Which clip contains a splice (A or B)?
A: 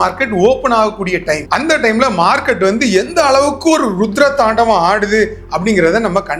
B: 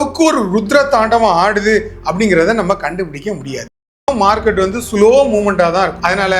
B